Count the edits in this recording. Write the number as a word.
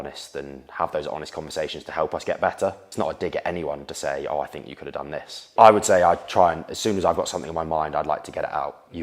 two